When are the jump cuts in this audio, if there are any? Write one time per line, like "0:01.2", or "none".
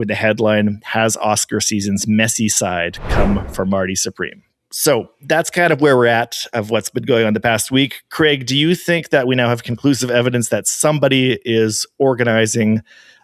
none